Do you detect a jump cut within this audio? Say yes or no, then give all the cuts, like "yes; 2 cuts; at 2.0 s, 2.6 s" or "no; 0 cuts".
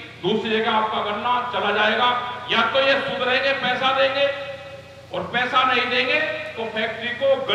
no; 0 cuts